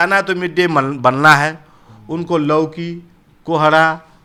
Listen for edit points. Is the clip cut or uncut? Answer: uncut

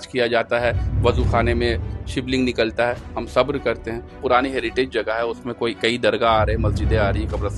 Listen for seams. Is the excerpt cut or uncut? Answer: cut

